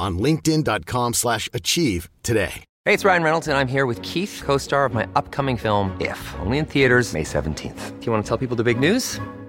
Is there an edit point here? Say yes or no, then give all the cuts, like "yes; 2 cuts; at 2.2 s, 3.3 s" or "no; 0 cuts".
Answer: yes; 1 cut; at 2.7 s